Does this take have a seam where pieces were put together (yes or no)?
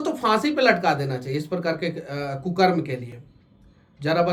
no